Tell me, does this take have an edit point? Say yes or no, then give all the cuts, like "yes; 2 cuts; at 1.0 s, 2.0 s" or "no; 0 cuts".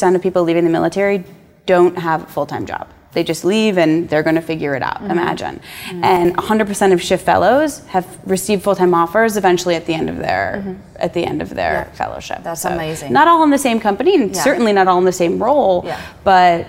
no; 0 cuts